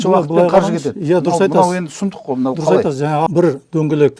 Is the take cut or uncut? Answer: cut